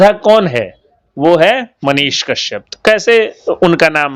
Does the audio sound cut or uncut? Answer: uncut